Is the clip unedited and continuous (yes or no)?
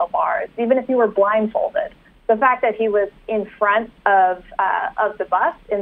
yes